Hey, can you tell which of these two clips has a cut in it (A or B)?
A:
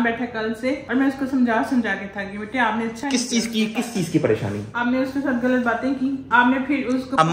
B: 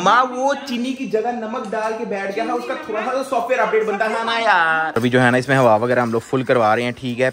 B